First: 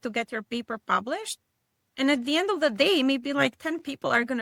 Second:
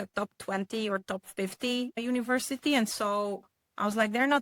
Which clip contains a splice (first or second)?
second